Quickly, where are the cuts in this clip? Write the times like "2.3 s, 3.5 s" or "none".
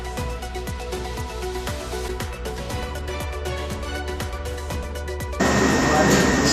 none